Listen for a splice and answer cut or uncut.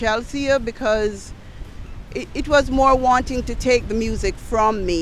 uncut